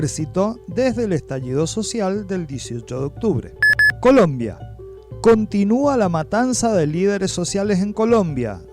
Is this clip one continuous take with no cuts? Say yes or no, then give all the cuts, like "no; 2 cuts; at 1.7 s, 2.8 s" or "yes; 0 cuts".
no; 1 cut; at 3.5 s